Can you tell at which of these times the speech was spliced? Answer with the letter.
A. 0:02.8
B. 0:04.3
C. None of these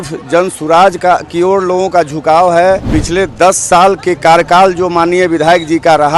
A